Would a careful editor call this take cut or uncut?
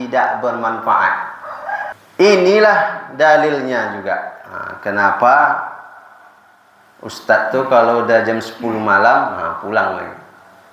cut